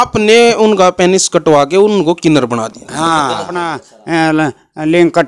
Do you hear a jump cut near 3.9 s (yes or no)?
yes